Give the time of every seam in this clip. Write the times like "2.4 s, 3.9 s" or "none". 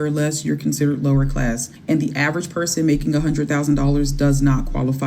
1.7 s